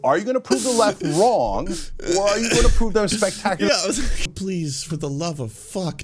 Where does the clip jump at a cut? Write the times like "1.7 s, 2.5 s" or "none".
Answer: 4.3 s